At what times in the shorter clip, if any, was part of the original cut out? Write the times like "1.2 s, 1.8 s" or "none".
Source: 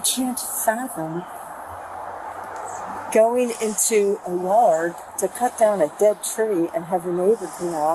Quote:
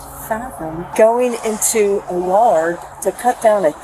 0.9 s